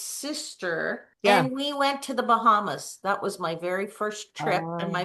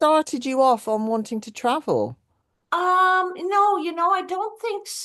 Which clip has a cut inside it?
first; 1 cut; at 1.1 s

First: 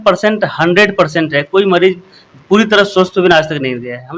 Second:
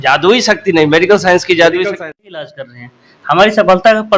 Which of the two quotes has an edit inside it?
second; 1 cut; at 2.5 s

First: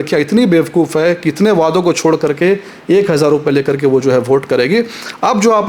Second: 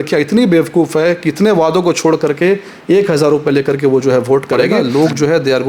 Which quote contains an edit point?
second; 1 cut; at 4.7 s

